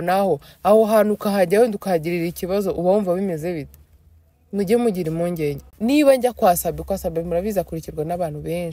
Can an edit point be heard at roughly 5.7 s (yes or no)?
yes